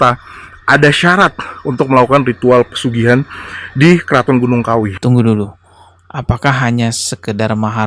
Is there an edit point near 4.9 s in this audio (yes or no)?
yes